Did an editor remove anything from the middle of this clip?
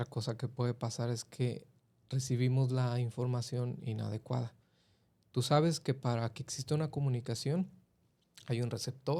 no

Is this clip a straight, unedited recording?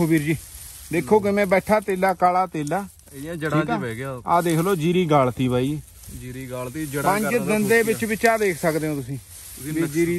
yes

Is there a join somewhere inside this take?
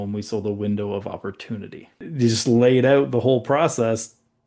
yes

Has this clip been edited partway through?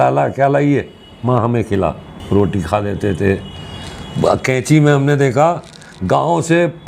no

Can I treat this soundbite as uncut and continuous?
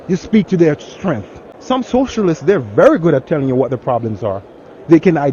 no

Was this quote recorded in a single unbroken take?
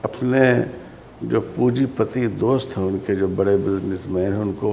yes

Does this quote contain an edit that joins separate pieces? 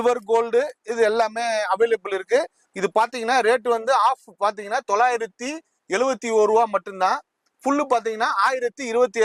no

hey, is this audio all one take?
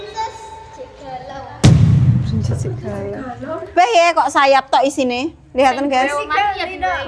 no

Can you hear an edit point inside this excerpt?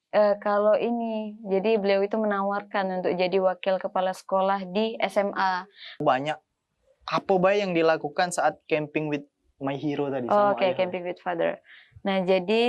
yes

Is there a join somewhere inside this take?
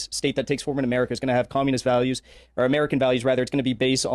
no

